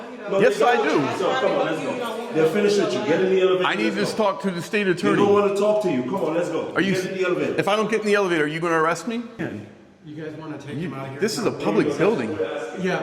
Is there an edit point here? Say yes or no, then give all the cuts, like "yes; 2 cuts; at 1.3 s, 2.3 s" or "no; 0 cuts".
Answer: yes; 1 cut; at 9.4 s